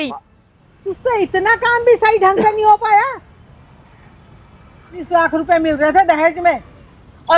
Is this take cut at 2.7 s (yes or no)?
no